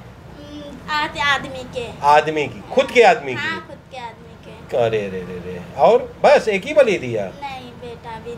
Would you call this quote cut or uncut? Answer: uncut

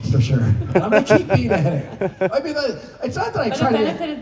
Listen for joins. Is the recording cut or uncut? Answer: uncut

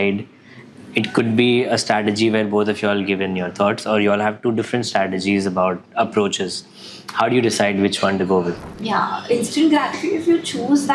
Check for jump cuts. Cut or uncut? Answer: cut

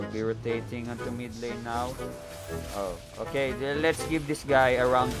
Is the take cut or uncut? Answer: uncut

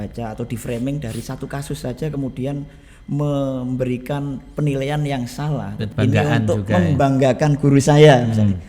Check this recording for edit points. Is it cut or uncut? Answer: cut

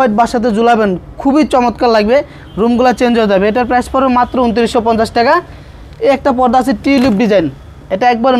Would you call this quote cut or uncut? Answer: uncut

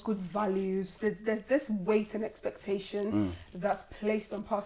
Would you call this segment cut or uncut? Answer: cut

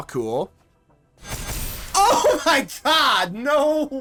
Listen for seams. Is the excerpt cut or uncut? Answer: uncut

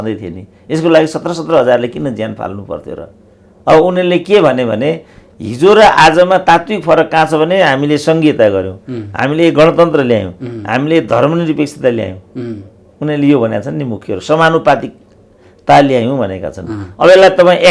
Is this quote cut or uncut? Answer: uncut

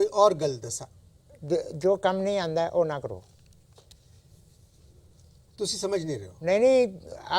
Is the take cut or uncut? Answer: uncut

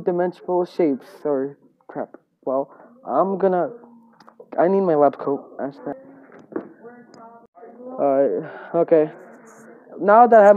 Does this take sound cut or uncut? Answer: cut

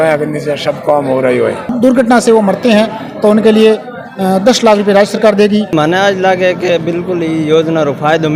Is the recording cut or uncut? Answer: cut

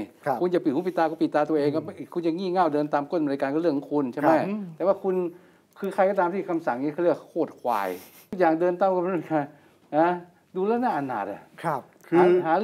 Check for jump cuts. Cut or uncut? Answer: cut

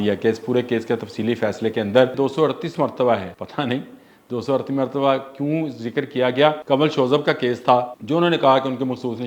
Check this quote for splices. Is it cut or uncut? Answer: cut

